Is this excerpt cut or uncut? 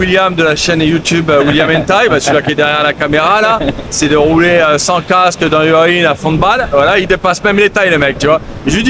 uncut